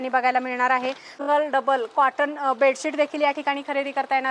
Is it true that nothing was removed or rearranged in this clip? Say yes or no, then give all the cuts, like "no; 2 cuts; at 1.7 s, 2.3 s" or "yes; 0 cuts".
no; 1 cut; at 1.1 s